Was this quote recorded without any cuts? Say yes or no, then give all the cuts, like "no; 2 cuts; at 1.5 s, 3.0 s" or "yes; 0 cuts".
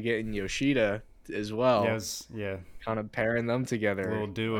yes; 0 cuts